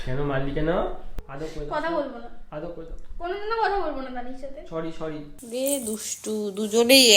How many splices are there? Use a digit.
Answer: 1